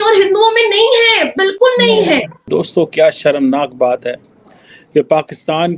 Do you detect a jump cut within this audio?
yes; 1 cut; at 2.4 s

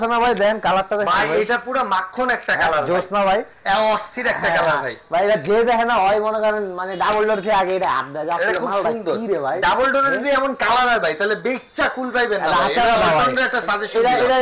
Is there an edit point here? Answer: no; 0 cuts

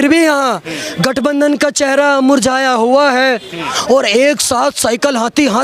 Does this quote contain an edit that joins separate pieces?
no; 0 cuts

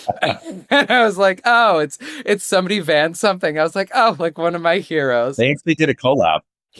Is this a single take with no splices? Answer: yes; 0 cuts

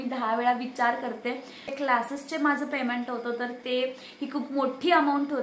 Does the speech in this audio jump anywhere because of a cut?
yes; 1 cut; at 1.7 s

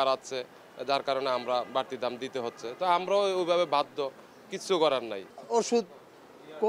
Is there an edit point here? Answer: no; 0 cuts

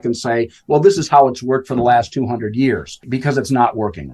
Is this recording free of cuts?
no; 1 cut; at 2.9 s

